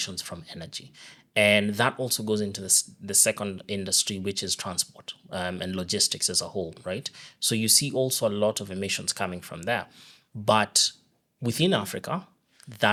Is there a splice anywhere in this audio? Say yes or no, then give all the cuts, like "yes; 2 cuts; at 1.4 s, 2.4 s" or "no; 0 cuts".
no; 0 cuts